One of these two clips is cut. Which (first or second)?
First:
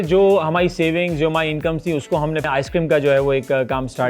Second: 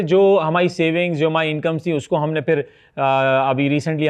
first